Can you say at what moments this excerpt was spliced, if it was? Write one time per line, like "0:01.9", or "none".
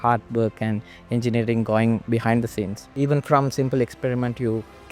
0:02.8